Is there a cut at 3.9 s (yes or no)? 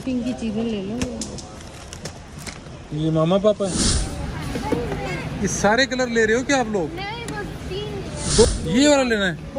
yes